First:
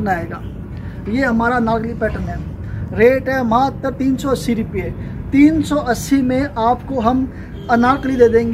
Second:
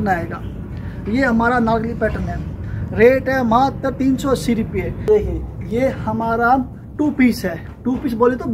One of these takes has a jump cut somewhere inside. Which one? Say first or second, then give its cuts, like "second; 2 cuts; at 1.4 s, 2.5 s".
second; 1 cut; at 5.1 s